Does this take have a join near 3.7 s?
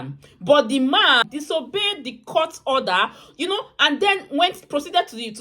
no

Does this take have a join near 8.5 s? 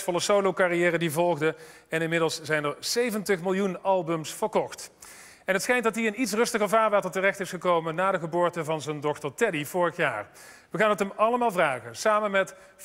yes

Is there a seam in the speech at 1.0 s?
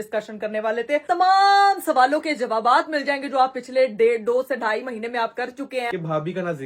yes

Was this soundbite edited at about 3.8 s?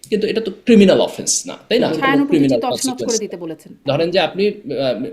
yes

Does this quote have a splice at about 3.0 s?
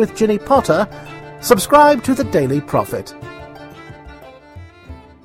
yes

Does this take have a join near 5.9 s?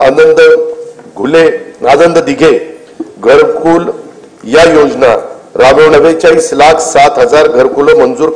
yes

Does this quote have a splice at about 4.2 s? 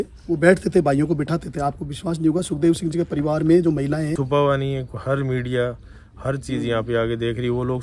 yes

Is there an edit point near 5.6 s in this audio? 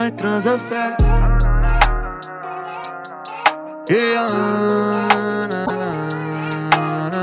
yes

